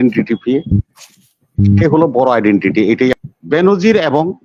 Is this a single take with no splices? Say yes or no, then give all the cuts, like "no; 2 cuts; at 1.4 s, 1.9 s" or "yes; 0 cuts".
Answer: no; 1 cut; at 3.2 s